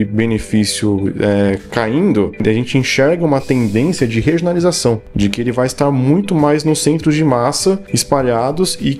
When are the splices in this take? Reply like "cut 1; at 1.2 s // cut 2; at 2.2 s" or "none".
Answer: cut 1; at 2.4 s // cut 2; at 5.1 s // cut 3; at 7.9 s